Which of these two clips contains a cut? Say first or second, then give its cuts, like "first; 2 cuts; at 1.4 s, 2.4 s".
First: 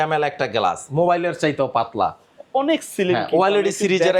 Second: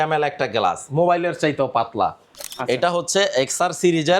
second; 1 cut; at 2.3 s